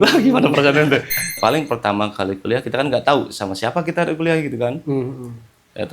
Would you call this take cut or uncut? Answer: cut